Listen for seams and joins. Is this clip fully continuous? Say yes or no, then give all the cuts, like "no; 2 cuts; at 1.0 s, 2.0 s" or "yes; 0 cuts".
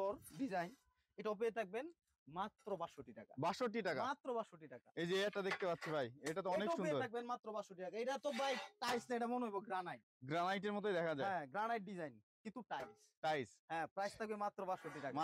yes; 0 cuts